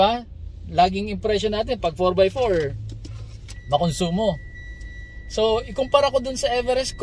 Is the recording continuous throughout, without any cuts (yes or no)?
yes